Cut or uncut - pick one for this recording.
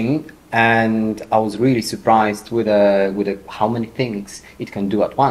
uncut